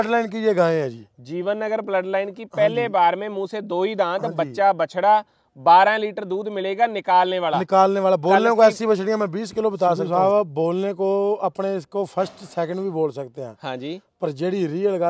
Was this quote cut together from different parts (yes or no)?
yes